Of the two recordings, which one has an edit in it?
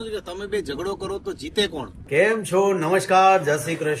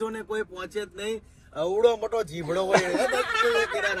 first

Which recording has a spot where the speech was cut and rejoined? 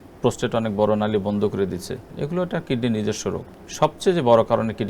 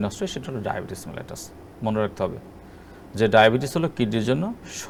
first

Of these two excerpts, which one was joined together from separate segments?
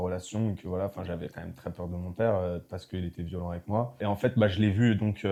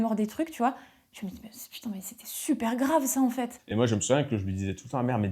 second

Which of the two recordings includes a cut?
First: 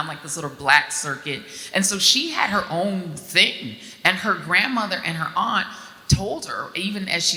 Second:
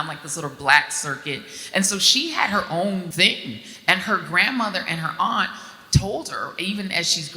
second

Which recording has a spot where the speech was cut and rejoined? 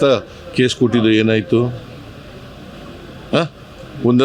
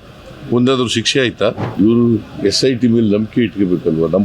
second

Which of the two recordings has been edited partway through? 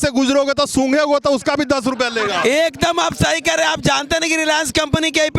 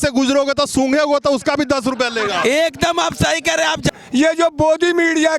second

